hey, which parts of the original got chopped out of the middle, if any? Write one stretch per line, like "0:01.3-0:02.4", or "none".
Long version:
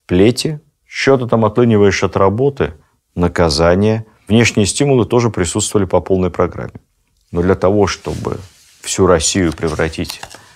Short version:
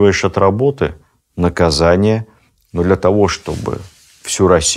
0:04.1-0:06.9